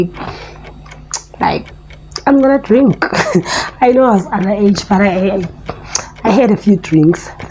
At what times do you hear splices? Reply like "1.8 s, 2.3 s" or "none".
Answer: none